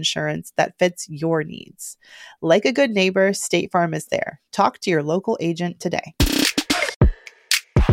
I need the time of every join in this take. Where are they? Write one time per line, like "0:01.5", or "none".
0:06.9